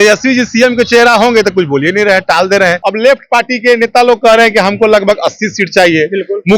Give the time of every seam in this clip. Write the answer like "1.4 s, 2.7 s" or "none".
2.8 s